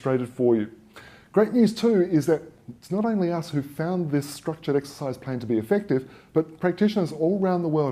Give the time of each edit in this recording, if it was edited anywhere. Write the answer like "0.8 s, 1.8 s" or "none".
2.1 s